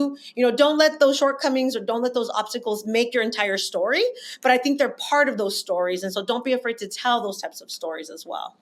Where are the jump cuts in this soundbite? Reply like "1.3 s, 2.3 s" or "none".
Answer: none